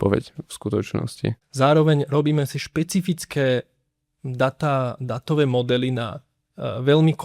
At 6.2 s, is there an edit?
no; 1 cut; at 1.4 s

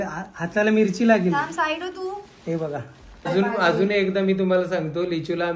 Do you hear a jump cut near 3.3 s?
yes; 1 cut; at 3.3 s

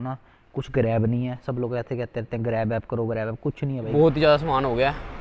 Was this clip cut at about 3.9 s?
yes; 1 cut; at 3.9 s

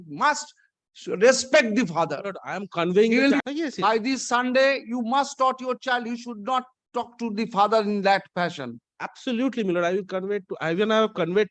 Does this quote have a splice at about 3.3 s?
yes; 1 cut; at 3.3 s

